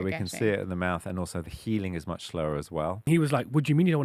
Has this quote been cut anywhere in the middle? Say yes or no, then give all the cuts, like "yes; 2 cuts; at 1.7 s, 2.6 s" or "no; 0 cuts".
yes; 1 cut; at 3.1 s